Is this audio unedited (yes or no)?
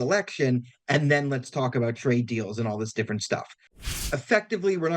no